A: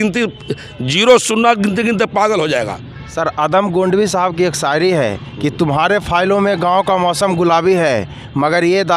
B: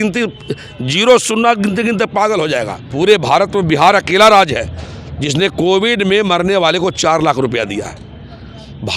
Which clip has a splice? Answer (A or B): B